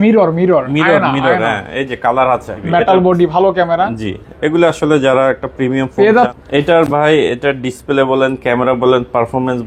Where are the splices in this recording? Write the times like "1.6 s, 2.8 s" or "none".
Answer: 2.5 s, 6.3 s